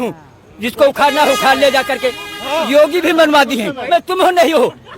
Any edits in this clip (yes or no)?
yes